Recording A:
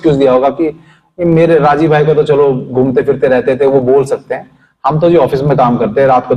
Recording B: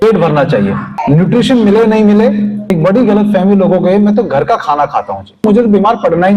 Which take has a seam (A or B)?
B